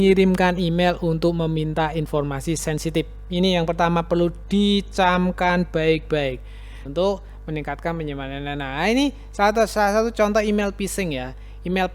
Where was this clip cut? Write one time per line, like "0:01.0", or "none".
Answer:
0:06.8